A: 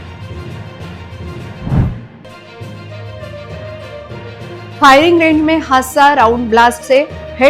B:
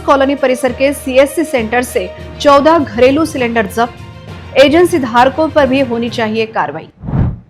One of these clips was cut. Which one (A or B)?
A